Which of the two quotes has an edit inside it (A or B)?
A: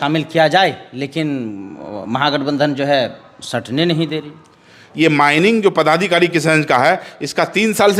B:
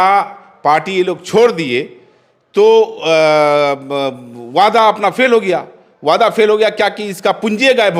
A